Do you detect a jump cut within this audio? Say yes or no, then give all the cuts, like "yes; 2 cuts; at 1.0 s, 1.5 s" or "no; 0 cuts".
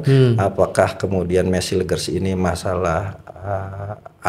no; 0 cuts